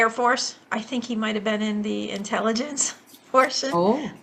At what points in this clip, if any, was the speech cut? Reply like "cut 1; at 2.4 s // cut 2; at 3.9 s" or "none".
none